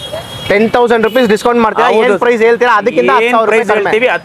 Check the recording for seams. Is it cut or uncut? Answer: uncut